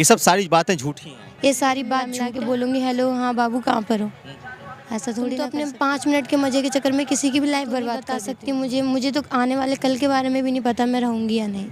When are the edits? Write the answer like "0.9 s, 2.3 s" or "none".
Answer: 2.1 s, 5.5 s, 8.1 s